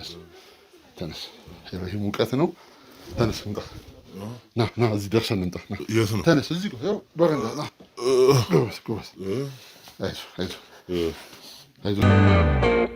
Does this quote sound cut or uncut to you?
cut